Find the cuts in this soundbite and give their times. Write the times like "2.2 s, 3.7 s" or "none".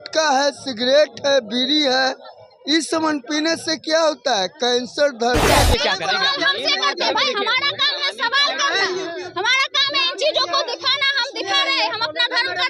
5.6 s